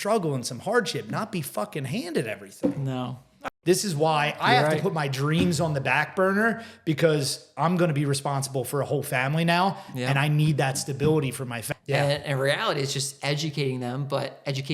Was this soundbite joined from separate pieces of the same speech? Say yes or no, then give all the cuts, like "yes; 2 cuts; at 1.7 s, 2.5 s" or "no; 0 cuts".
yes; 2 cuts; at 3.4 s, 11.6 s